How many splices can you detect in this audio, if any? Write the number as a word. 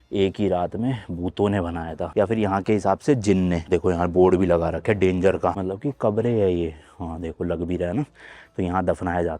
two